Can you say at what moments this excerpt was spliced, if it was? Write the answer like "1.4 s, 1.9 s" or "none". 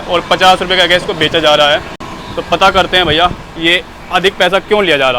none